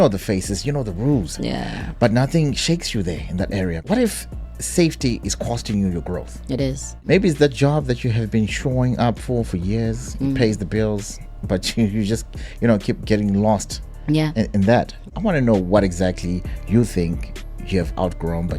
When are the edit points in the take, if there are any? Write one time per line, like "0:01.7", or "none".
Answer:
0:03.8
0:07.0
0:15.1